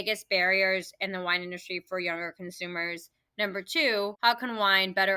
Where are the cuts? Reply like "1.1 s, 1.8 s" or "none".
4.2 s